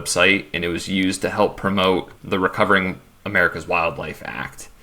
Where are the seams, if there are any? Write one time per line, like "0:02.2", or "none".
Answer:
0:02.1